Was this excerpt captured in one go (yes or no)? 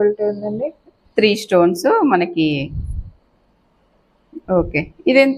yes